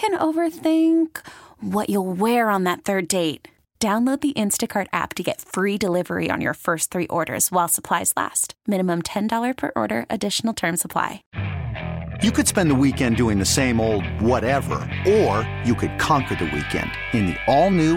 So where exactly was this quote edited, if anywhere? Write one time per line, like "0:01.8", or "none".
0:11.3